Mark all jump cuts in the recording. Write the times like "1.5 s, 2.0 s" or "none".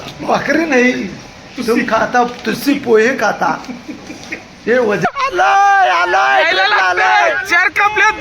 5.0 s